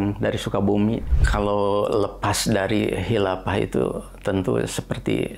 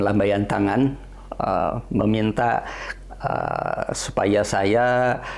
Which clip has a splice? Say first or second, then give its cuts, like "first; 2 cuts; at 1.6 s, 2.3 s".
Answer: first; 1 cut; at 1.1 s